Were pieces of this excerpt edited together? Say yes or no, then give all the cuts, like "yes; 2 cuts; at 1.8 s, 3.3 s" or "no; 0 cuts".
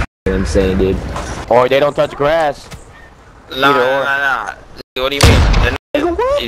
no; 0 cuts